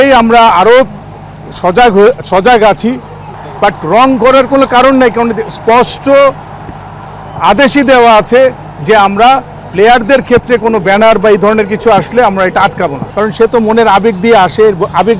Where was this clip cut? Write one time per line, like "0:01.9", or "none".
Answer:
0:03.3
0:13.0